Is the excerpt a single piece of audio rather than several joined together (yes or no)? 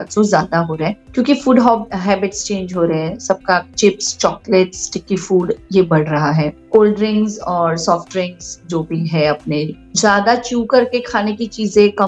no